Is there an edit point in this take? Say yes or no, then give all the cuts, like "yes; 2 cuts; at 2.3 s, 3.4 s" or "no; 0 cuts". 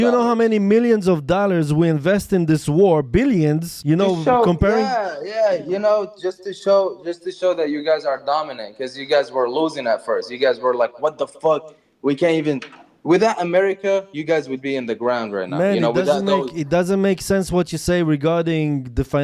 yes; 1 cut; at 3.7 s